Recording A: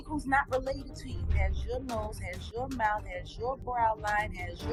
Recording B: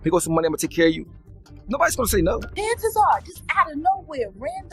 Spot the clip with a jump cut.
B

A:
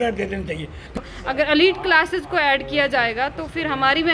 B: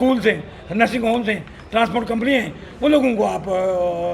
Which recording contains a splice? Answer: A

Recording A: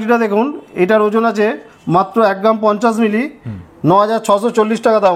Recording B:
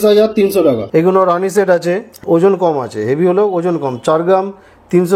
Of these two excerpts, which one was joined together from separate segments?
B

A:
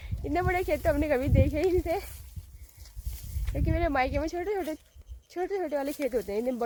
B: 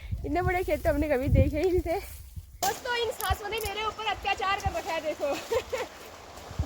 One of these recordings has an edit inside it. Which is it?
B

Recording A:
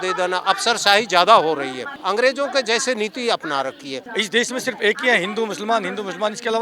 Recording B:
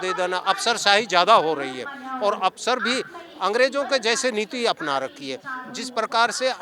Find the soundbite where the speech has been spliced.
A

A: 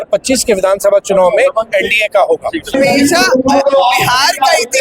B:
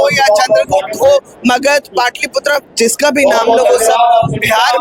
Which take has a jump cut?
A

